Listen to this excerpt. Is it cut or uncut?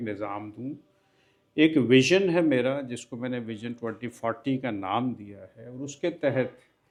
uncut